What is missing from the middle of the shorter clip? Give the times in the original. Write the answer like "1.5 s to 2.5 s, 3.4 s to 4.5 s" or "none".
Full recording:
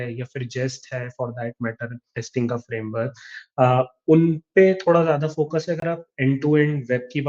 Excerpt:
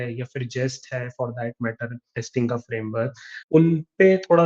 3.5 s to 4.1 s